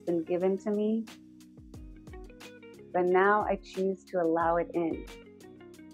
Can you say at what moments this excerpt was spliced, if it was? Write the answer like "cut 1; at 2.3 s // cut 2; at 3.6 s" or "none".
cut 1; at 1.1 s // cut 2; at 2.9 s // cut 3; at 5.0 s